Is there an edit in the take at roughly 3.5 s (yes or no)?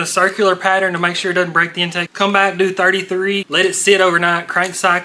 yes